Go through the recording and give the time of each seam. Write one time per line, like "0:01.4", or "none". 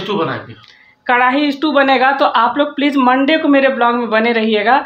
none